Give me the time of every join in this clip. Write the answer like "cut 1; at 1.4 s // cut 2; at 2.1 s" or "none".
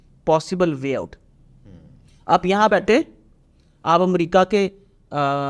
none